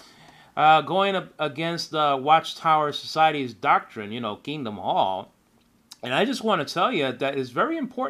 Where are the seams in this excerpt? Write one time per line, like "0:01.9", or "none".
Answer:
0:05.3